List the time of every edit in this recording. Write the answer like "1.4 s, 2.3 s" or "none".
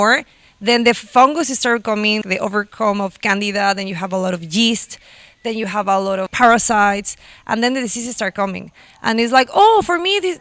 2.2 s, 6.3 s